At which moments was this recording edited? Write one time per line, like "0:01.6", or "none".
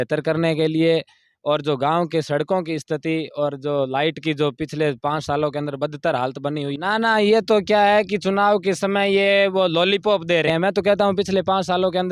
0:06.7
0:10.5